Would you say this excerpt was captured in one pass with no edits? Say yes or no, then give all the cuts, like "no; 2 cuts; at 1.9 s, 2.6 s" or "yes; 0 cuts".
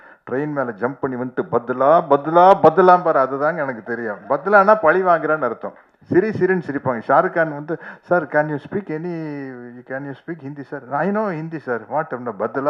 yes; 0 cuts